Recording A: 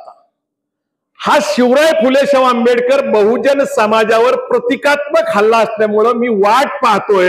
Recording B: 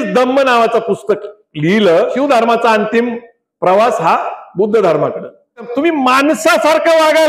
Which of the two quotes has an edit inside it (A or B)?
B